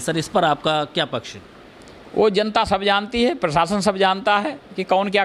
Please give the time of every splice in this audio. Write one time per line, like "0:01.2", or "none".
none